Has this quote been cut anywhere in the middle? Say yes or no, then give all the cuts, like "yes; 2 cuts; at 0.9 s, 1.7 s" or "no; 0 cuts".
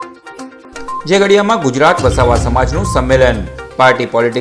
yes; 1 cut; at 1.0 s